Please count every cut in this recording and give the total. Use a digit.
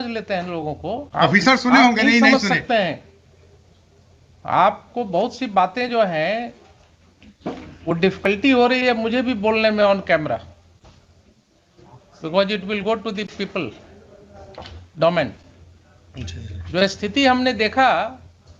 1